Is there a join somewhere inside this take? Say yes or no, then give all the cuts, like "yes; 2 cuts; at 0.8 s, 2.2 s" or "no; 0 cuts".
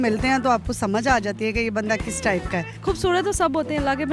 yes; 1 cut; at 2.7 s